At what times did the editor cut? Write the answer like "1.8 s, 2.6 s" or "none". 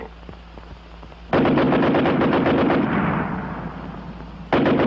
none